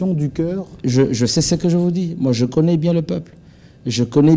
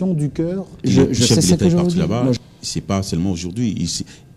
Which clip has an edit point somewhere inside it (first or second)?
second